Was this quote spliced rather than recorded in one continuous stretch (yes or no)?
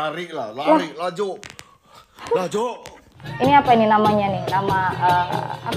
yes